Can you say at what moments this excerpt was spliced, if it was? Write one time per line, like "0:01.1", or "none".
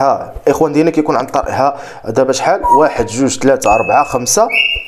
none